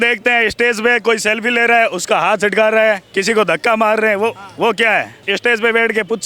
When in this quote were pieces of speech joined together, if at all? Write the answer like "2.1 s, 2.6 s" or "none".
5.2 s